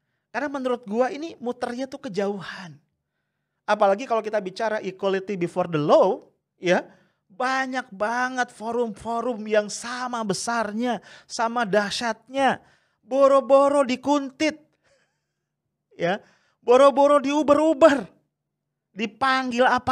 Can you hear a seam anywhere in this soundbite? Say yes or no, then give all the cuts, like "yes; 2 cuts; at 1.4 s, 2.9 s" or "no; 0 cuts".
no; 0 cuts